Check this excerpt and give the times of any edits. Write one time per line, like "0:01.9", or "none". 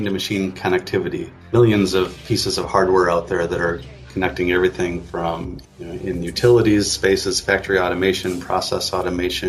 0:01.4
0:05.6